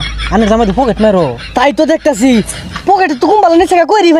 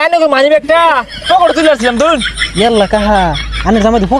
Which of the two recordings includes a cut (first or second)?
second